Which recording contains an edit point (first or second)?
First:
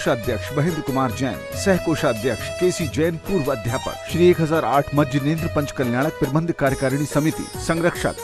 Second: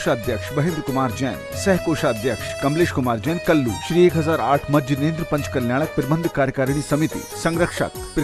first